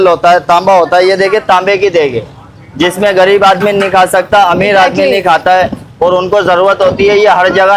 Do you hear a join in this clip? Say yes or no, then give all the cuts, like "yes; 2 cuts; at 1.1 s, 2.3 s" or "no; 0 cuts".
no; 0 cuts